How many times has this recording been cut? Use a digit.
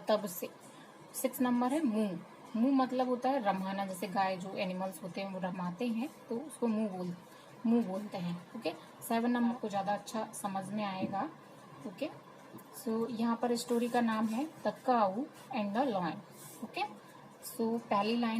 1